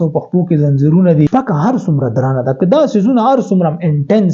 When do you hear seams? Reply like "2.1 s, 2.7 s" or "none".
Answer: 1.3 s